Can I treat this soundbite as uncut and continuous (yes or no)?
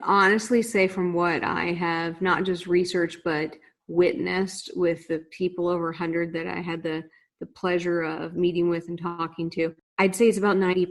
no